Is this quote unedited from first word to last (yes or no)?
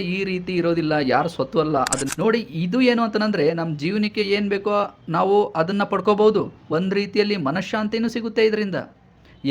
no